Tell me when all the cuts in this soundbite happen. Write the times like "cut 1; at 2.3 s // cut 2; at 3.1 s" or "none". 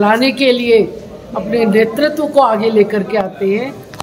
none